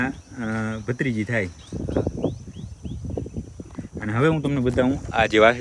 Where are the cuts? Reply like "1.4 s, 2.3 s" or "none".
none